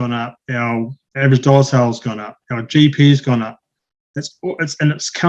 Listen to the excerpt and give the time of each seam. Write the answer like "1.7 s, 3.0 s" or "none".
1.0 s